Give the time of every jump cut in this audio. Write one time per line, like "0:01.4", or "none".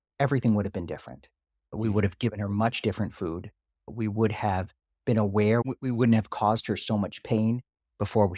0:01.7
0:03.9
0:05.6